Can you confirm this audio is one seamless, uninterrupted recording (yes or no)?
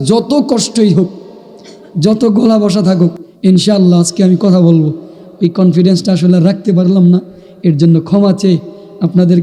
yes